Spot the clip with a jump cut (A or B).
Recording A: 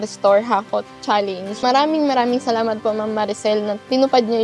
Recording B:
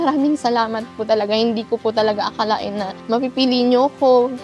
A